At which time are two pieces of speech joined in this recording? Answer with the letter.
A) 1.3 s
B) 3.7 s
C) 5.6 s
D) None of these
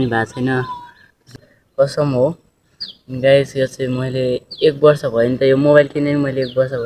A